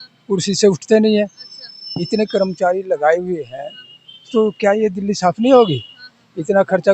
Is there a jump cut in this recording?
no; 0 cuts

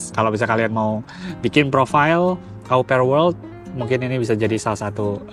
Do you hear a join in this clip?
no; 0 cuts

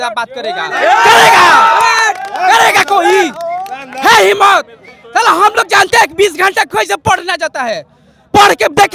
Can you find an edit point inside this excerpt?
no; 0 cuts

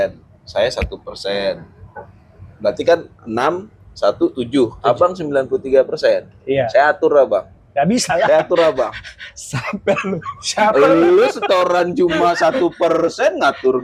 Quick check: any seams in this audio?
no; 0 cuts

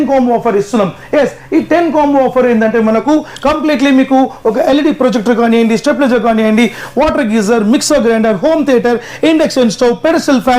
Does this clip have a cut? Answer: no; 0 cuts

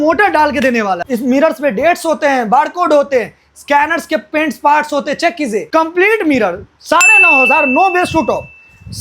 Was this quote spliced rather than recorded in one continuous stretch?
yes; 2 cuts; at 1.0 s, 5.7 s

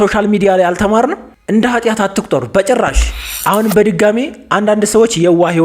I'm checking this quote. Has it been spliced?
yes; 2 cuts; at 1.3 s, 3.3 s

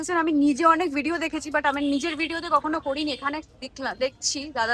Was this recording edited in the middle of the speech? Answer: no; 0 cuts

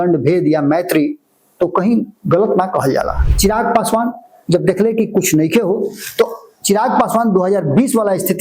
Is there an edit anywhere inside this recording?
yes; 1 cut; at 3.2 s

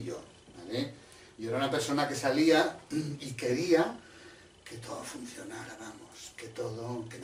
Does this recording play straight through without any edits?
yes; 0 cuts

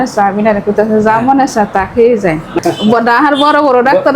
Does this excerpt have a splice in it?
yes; 1 cut; at 2.6 s

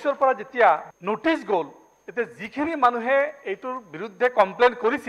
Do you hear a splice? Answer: yes; 1 cut; at 0.9 s

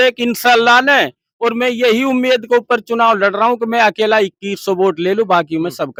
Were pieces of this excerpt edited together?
no; 0 cuts

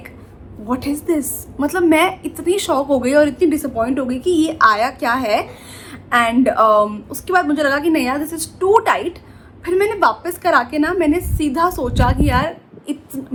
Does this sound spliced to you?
no; 0 cuts

